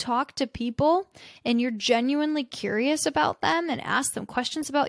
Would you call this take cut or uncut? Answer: uncut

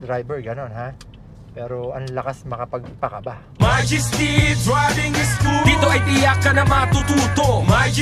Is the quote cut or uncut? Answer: cut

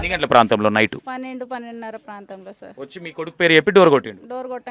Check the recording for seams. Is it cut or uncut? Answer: cut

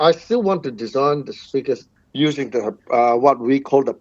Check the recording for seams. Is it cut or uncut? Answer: cut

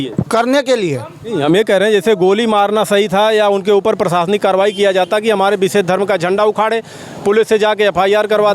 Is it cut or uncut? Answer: cut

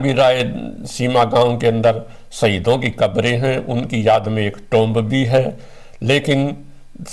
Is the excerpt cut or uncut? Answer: uncut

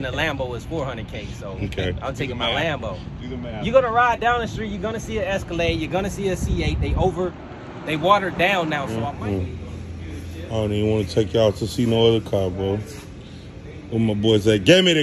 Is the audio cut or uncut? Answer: cut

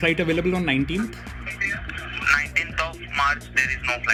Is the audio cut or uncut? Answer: uncut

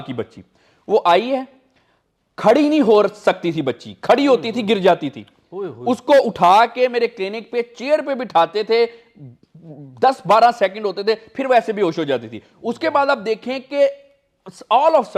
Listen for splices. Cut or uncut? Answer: uncut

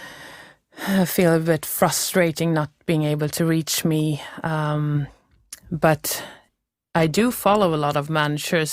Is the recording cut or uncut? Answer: uncut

